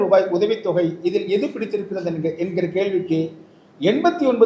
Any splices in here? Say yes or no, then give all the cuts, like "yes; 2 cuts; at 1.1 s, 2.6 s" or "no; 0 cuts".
no; 0 cuts